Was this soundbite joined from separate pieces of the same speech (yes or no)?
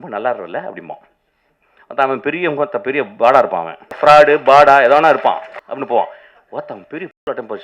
yes